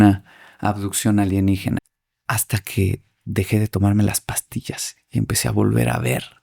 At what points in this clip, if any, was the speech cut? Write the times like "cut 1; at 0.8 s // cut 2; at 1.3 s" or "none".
cut 1; at 1.8 s